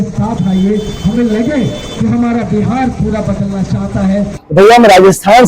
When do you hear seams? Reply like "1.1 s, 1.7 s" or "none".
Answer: 4.4 s